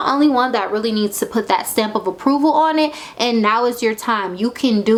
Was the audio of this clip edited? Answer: no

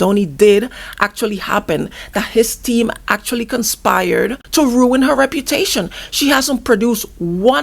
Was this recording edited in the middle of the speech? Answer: yes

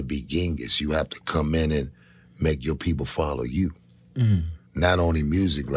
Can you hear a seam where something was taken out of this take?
yes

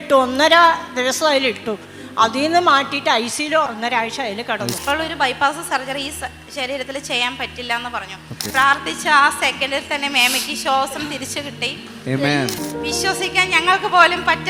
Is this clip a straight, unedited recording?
no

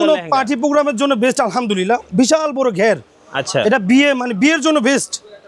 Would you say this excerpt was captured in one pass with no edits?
yes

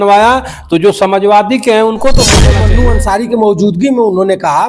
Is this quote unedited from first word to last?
no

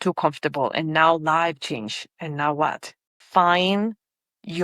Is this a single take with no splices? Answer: no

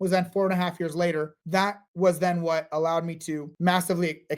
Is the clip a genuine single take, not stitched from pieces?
no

